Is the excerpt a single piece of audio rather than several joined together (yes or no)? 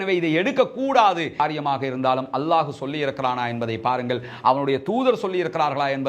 no